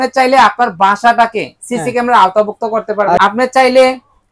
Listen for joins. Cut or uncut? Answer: cut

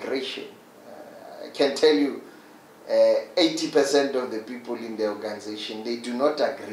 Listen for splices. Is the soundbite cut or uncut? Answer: uncut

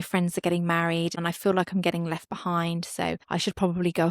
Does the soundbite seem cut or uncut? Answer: cut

